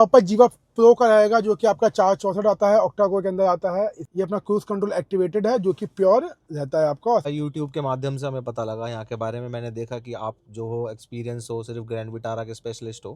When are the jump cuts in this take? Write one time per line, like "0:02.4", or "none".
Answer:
0:04.0
0:07.2